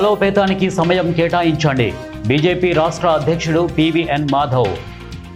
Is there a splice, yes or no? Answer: no